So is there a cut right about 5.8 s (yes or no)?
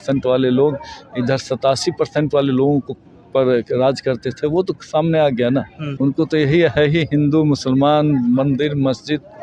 yes